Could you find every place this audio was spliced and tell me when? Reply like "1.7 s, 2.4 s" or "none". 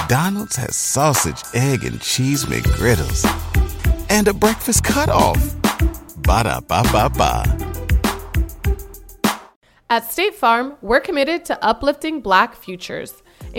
9.6 s